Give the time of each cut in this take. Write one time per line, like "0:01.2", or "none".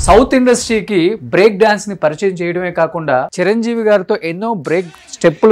0:03.3